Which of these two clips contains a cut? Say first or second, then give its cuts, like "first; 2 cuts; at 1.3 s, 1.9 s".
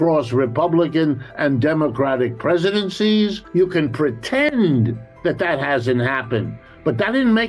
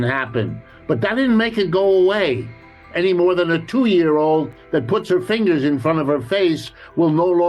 first; 1 cut; at 3.5 s